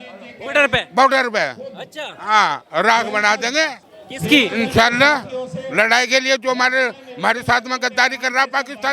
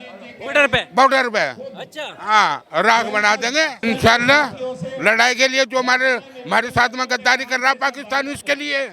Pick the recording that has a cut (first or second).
second